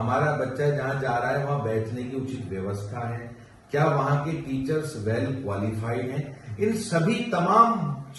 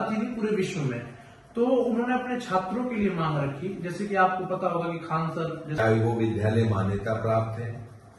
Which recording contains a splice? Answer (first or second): second